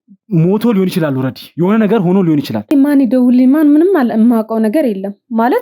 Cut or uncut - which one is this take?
cut